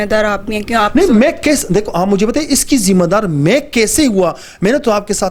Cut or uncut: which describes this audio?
uncut